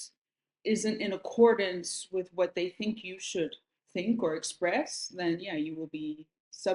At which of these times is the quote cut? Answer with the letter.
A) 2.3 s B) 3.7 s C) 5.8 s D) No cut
D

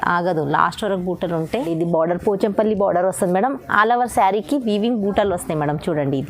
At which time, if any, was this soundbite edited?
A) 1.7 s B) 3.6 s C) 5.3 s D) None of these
A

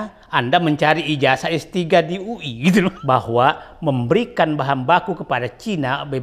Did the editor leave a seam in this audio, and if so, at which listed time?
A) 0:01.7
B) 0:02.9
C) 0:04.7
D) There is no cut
B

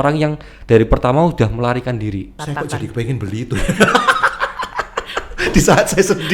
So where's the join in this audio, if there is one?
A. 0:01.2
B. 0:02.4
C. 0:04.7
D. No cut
B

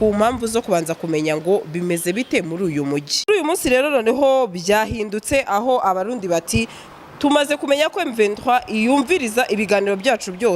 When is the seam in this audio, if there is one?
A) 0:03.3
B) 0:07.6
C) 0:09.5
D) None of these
A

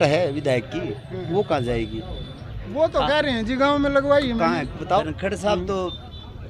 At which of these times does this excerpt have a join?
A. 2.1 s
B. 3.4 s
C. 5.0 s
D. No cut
C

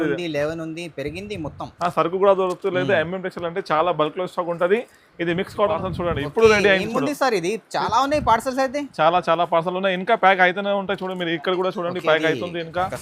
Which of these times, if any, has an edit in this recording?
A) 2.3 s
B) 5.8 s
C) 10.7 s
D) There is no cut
B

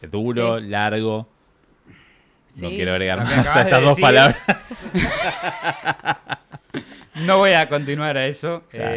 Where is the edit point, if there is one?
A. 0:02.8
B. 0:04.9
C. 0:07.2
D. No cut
D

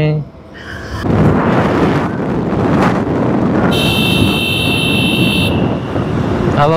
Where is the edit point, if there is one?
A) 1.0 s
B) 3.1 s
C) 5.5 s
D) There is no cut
A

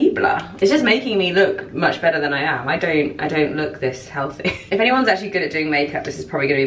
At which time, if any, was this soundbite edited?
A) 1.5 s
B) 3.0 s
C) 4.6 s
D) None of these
C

